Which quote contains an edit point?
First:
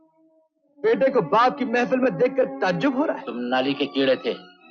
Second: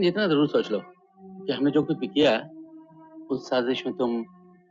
first; 1 cut; at 3.3 s

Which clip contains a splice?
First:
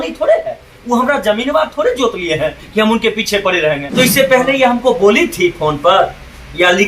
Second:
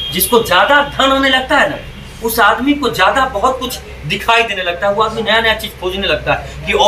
first; 1 cut; at 3.9 s

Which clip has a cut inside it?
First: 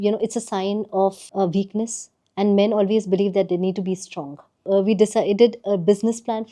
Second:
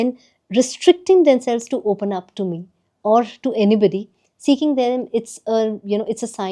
first; 2 cuts; at 1.8 s, 4.6 s

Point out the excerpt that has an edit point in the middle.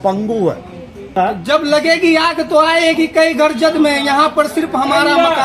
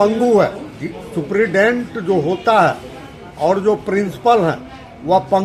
first; 1 cut; at 1.1 s

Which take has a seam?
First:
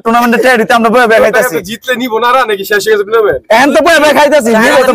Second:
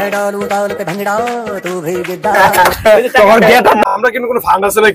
second; 1 cut; at 3.9 s

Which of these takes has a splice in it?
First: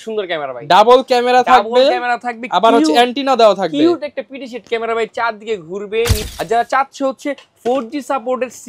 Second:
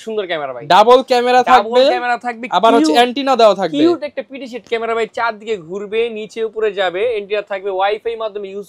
first; 1 cut; at 6.2 s

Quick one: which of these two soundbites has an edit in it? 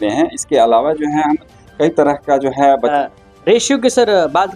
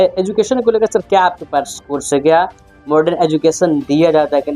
first; 1 cut; at 2.9 s

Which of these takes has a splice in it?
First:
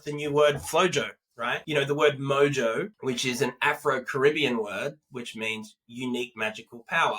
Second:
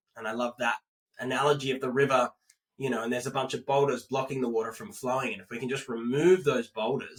first; 2 cuts; at 1.6 s, 2.9 s

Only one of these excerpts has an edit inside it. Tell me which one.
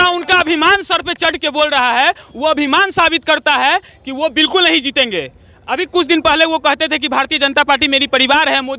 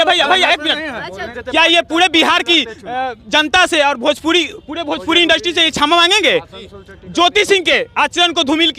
second; 1 cut; at 1.3 s

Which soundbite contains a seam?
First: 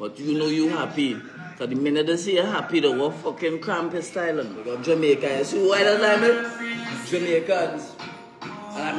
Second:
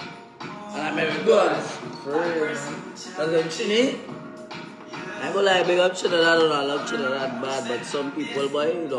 first; 1 cut; at 4.6 s

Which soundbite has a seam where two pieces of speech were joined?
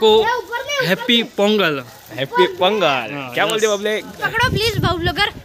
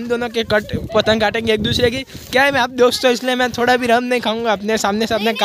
first; 1 cut; at 4.2 s

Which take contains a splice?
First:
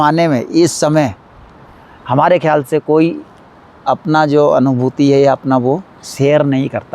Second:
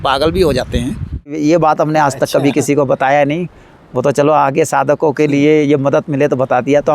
second; 1 cut; at 1.4 s

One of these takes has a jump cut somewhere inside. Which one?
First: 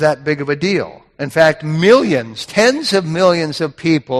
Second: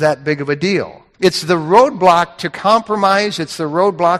second; 1 cut; at 1.0 s

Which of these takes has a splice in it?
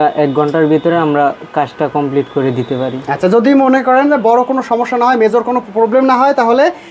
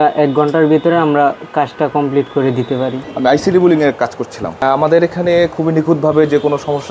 second; 2 cuts; at 3.0 s, 4.6 s

